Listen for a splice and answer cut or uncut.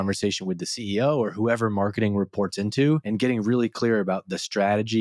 cut